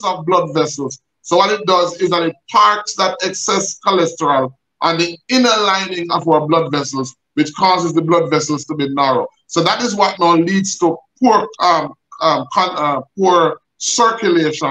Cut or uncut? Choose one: uncut